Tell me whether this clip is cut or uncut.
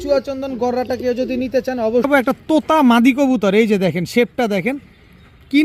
cut